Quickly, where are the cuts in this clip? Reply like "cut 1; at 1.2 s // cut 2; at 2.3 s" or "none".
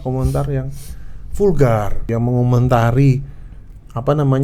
cut 1; at 2.0 s

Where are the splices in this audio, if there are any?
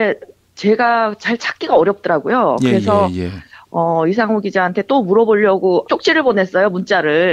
cut 1; at 3.8 s

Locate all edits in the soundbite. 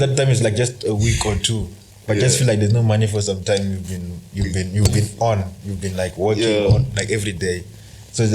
none

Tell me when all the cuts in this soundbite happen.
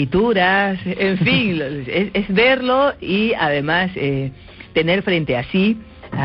cut 1; at 3.6 s

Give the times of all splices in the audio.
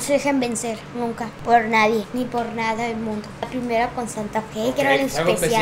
cut 1; at 1.3 s // cut 2; at 2.1 s // cut 3; at 3.5 s

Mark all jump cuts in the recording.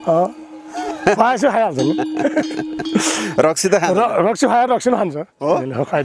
none

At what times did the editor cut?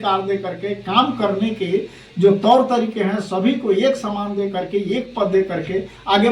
none

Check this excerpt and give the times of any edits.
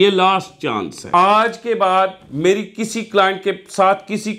cut 1; at 1.0 s

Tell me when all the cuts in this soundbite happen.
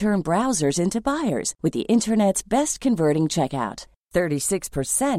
none

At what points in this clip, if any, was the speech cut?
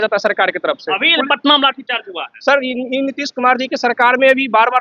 none

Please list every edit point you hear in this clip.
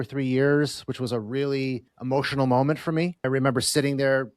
cut 1; at 1.9 s // cut 2; at 3.2 s

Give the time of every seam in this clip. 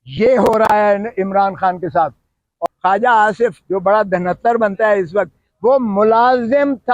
cut 1; at 2.5 s

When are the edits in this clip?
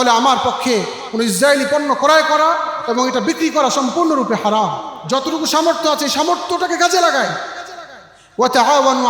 cut 1; at 4.9 s

